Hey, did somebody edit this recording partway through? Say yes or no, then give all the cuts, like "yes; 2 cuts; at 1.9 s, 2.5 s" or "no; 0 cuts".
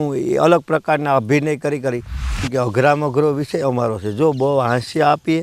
yes; 1 cut; at 2.5 s